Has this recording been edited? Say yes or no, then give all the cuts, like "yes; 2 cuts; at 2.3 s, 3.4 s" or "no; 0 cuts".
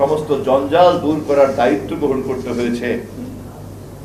no; 0 cuts